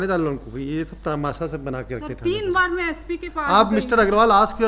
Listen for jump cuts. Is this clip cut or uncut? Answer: uncut